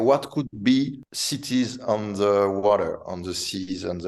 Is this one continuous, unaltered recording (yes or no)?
yes